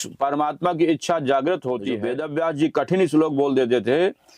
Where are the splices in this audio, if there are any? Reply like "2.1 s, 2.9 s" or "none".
2.1 s